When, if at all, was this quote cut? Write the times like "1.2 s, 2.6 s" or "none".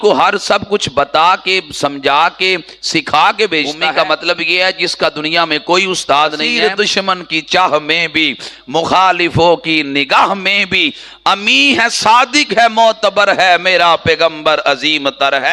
3.9 s, 6.5 s